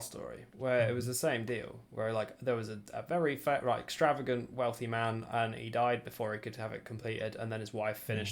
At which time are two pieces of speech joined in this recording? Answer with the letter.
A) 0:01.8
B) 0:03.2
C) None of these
C